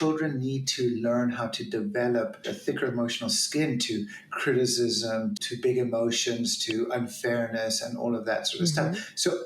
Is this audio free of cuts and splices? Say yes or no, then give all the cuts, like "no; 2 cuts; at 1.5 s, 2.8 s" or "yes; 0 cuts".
no; 2 cuts; at 2.5 s, 5.4 s